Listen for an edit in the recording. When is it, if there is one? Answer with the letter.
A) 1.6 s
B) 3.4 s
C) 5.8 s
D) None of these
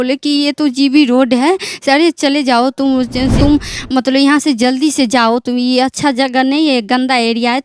B